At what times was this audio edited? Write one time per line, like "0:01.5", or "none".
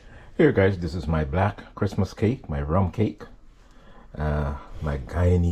none